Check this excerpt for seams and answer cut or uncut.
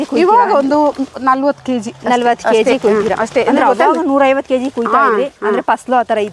uncut